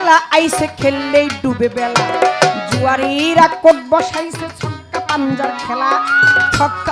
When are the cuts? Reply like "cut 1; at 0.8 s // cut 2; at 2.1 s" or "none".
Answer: none